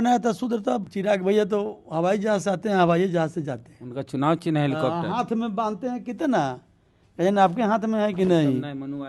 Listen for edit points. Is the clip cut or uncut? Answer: cut